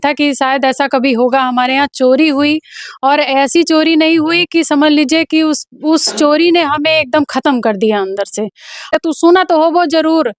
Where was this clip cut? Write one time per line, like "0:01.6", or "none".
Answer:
0:08.9